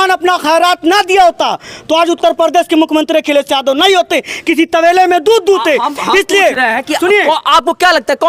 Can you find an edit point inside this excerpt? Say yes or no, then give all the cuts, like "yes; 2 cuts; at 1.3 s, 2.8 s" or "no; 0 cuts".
no; 0 cuts